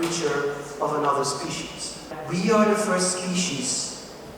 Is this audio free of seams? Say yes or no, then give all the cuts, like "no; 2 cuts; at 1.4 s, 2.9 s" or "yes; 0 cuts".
no; 1 cut; at 2.2 s